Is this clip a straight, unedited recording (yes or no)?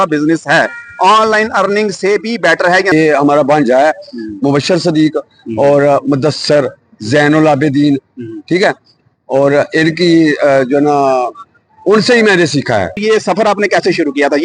no